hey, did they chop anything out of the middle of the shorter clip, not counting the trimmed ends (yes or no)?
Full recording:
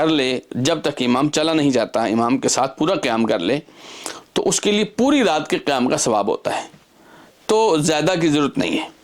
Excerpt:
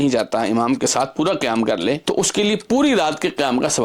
yes